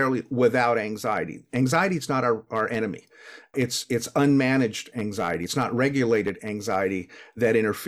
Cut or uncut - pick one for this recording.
cut